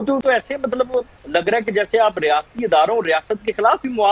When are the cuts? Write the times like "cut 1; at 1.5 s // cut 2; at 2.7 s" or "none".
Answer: none